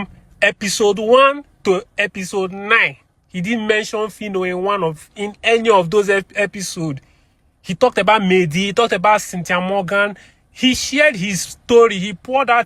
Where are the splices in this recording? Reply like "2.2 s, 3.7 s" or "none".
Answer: none